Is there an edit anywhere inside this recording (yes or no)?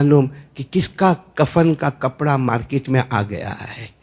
no